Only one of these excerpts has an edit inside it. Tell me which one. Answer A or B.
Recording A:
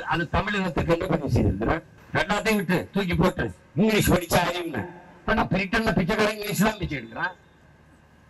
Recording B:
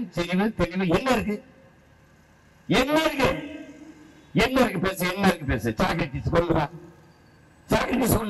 A